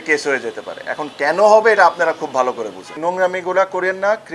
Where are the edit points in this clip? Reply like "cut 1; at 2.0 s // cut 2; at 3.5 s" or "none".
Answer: cut 1; at 2.8 s